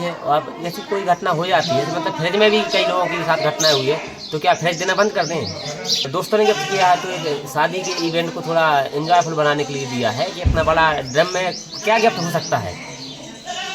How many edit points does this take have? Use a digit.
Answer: 1